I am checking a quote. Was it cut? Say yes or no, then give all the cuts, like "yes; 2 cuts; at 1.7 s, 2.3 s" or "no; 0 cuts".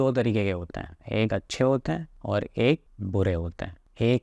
yes; 1 cut; at 2.1 s